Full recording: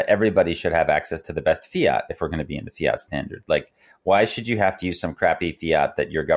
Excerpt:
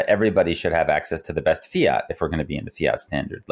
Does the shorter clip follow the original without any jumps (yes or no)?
yes